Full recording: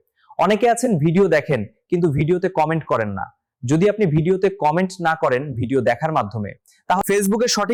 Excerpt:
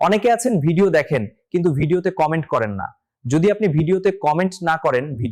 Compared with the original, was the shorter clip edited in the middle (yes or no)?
no